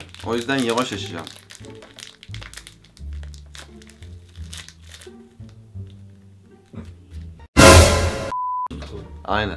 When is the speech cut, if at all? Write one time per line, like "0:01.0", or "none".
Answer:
0:08.4